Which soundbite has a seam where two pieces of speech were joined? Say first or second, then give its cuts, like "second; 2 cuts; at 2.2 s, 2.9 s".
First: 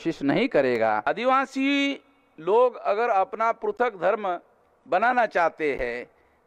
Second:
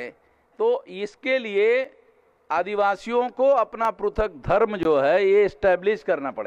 first; 1 cut; at 1.1 s